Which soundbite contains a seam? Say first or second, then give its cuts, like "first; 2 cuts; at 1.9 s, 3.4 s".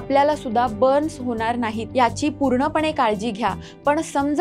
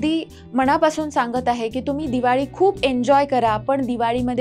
first; 1 cut; at 1.8 s